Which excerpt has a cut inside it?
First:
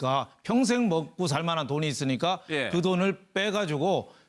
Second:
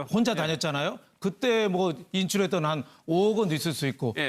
second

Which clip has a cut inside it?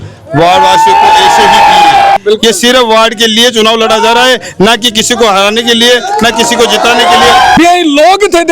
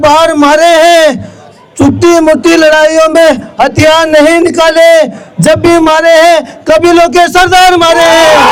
first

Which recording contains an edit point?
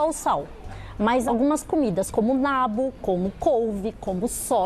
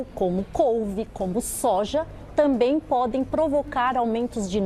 first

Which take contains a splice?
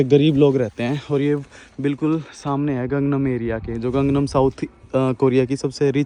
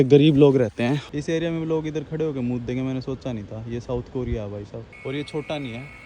second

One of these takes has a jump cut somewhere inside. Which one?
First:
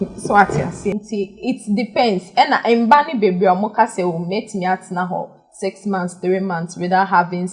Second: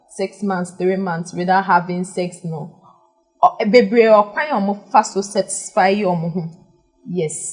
first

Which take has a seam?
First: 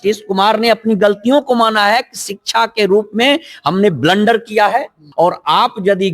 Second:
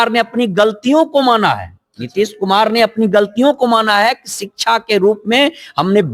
first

